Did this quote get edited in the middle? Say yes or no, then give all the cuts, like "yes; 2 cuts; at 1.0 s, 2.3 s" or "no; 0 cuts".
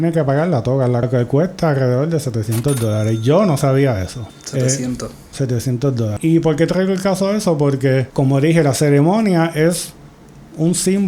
no; 0 cuts